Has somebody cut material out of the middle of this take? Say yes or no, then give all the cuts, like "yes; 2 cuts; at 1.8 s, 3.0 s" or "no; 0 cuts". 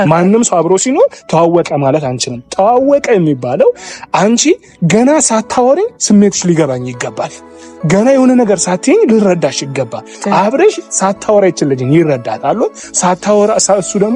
no; 0 cuts